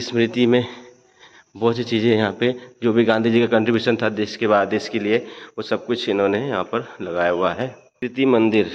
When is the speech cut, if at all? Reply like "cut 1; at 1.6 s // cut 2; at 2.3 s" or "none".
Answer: cut 1; at 7.8 s